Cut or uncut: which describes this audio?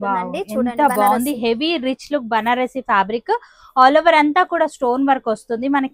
uncut